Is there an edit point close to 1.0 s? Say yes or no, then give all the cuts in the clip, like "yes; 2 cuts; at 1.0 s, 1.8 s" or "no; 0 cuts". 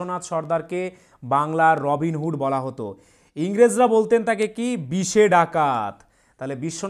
no; 0 cuts